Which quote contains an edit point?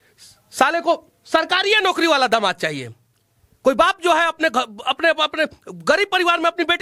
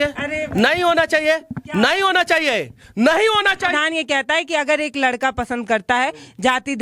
second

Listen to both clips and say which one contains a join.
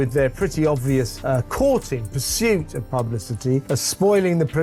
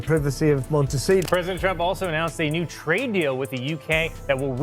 second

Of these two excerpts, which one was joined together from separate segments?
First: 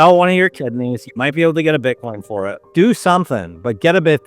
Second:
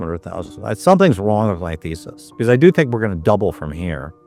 first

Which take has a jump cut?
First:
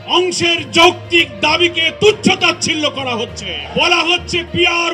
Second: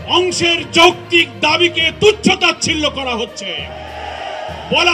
first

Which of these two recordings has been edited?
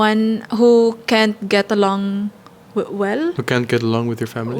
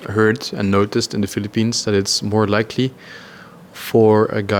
first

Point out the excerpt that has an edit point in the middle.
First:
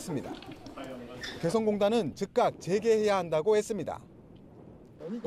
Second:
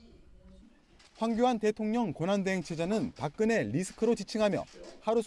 second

